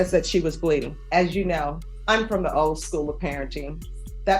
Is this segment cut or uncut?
cut